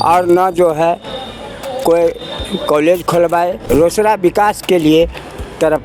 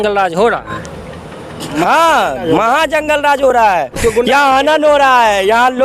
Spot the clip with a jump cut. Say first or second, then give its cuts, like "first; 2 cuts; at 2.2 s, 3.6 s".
first; 1 cut; at 3.6 s